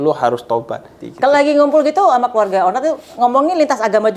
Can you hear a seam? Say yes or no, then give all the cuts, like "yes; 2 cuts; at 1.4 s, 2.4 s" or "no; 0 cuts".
yes; 1 cut; at 1.0 s